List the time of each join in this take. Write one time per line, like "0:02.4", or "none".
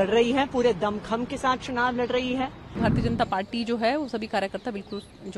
0:02.8